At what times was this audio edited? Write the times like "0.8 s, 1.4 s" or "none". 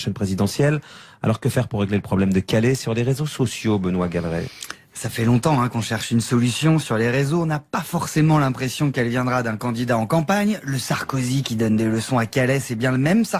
none